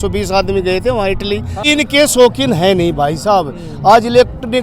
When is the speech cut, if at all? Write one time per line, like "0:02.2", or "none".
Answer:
0:01.7